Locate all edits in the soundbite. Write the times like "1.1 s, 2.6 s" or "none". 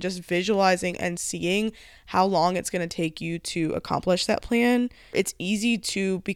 5.1 s